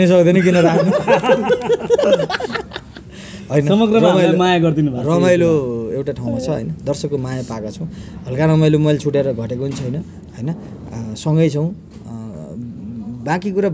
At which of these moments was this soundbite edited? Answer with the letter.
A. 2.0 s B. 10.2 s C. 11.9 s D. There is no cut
D